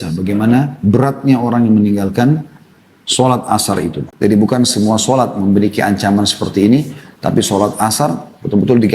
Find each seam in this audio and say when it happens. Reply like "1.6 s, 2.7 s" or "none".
4.0 s